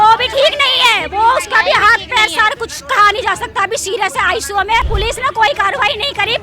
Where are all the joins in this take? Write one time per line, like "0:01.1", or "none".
0:04.8